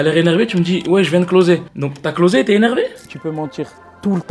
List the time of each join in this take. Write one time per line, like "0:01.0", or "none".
0:03.1